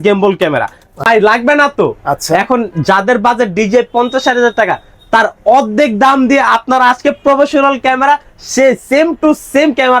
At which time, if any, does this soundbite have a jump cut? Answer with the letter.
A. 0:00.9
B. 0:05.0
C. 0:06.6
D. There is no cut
A